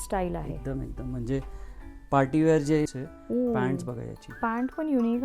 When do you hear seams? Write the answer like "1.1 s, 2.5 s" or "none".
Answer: 2.9 s